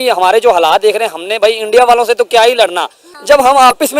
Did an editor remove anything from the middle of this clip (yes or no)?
yes